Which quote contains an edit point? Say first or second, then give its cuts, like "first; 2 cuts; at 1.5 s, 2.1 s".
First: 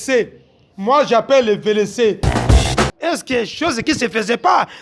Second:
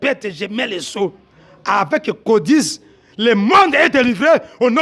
first; 1 cut; at 2.6 s